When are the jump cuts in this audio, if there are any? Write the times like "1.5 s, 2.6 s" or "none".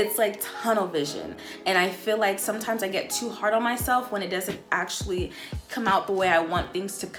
none